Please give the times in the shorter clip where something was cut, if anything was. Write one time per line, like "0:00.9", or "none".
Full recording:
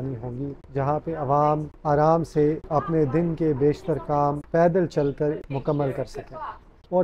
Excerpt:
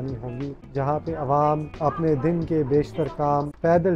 0:01.7